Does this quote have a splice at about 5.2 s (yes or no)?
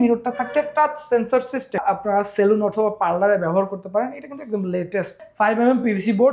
yes